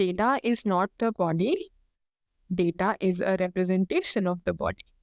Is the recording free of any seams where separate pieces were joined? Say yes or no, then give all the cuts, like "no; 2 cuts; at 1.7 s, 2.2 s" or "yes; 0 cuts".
yes; 0 cuts